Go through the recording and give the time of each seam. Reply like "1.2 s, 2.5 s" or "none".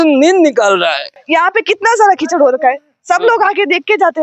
1.1 s